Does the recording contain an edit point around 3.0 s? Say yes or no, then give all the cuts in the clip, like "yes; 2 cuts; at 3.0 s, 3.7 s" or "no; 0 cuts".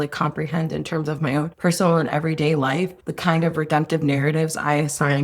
yes; 2 cuts; at 1.5 s, 3.0 s